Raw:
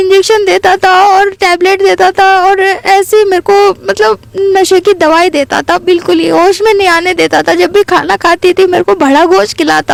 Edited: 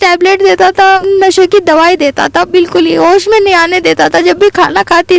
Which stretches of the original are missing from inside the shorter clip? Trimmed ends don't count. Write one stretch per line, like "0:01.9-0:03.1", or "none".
0:02.4-0:04.3